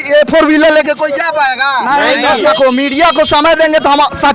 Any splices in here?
yes; 1 cut; at 2.4 s

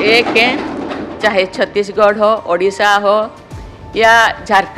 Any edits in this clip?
no; 0 cuts

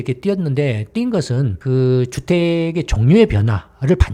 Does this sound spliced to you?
no; 0 cuts

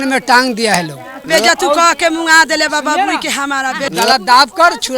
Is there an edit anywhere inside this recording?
yes; 2 cuts; at 1.3 s, 3.9 s

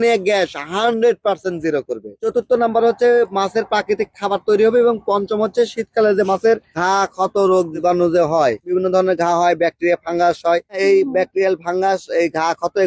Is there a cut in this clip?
no; 0 cuts

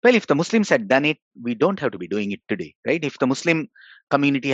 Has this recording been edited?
no; 0 cuts

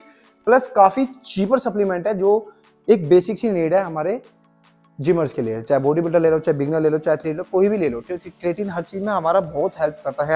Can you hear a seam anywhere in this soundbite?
no; 0 cuts

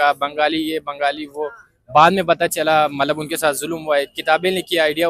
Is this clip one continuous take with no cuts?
yes; 0 cuts

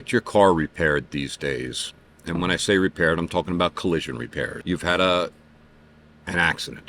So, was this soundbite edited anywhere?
yes; 1 cut; at 4.6 s

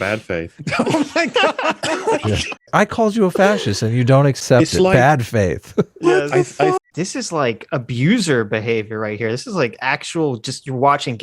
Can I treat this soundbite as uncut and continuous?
no; 3 cuts; at 2.7 s, 4.4 s, 6.8 s

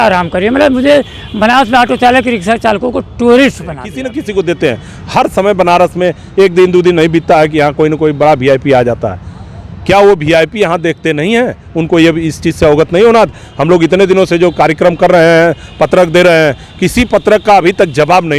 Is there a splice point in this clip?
yes; 1 cut; at 3.9 s

